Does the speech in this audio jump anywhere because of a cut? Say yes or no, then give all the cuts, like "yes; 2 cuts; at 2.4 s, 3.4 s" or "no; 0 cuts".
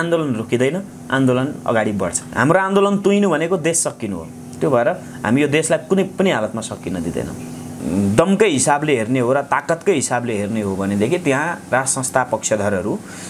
yes; 2 cuts; at 2.2 s, 7.7 s